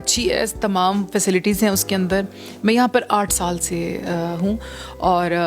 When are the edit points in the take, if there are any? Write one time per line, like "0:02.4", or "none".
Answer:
none